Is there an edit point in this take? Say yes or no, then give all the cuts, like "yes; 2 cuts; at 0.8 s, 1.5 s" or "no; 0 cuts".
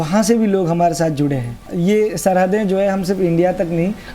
yes; 1 cut; at 1.7 s